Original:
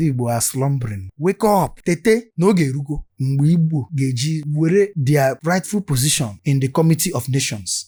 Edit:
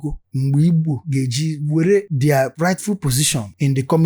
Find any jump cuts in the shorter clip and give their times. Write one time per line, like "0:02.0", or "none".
none